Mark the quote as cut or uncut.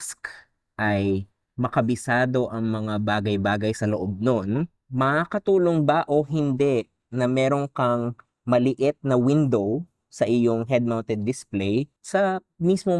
cut